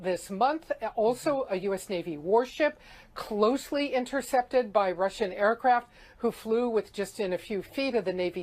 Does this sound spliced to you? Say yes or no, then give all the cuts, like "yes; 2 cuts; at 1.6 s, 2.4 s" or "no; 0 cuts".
yes; 1 cut; at 5.8 s